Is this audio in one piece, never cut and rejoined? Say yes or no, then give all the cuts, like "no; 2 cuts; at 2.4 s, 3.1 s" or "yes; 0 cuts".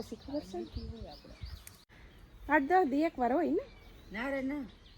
no; 1 cut; at 1.9 s